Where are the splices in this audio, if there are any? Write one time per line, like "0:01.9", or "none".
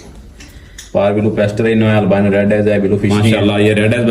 0:03.2